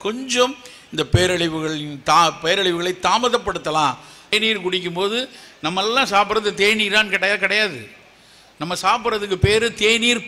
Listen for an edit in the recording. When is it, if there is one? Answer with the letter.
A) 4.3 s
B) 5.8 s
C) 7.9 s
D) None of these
A